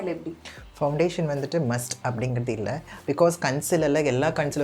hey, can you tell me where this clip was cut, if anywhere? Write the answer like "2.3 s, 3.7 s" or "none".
none